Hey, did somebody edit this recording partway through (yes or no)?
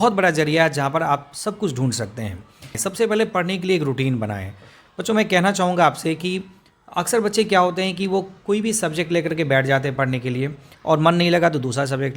yes